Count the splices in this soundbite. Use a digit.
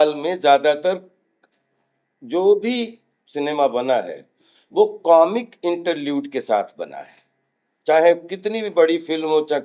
0